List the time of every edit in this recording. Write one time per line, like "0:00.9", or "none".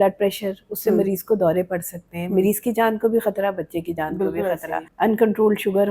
0:04.8